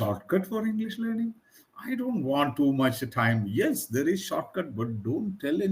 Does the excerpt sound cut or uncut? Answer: uncut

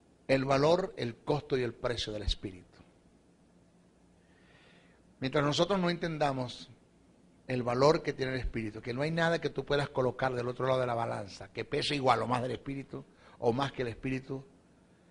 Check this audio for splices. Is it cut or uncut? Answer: uncut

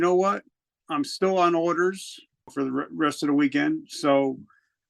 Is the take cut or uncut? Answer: cut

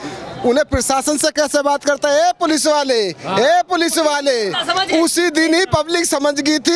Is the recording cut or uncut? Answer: uncut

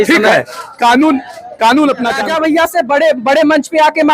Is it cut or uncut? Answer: cut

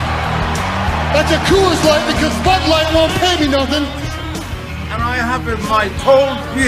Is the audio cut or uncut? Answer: cut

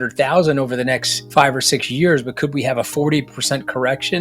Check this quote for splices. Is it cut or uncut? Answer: cut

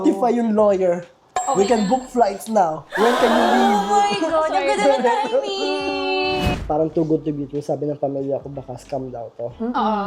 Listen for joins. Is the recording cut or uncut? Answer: cut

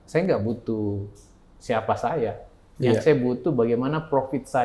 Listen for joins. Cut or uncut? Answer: uncut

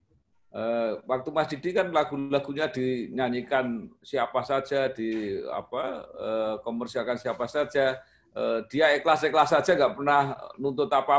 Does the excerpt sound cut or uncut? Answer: uncut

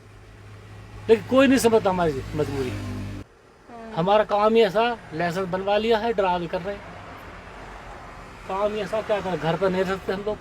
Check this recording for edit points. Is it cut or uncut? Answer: cut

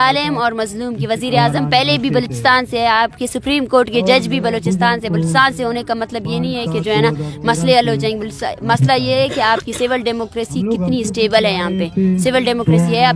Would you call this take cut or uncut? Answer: uncut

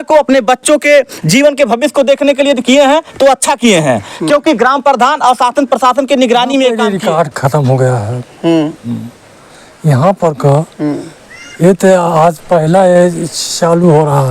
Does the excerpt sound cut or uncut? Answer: cut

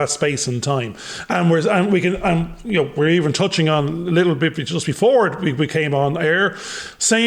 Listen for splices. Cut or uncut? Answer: uncut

